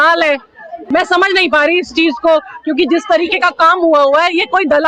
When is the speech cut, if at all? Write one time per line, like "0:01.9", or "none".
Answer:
none